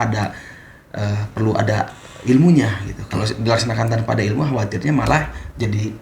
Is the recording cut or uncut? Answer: uncut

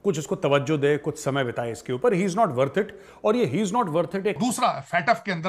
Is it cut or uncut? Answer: cut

